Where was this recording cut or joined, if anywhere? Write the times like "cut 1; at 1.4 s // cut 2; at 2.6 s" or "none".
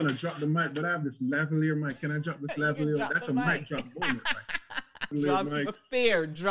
cut 1; at 5.1 s